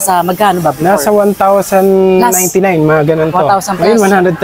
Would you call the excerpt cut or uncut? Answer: uncut